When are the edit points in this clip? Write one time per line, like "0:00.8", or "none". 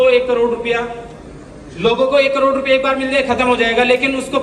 none